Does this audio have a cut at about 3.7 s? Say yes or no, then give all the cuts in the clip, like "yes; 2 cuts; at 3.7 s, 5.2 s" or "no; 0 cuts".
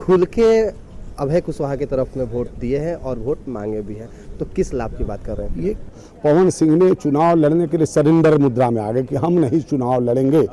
no; 1 cut; at 5.8 s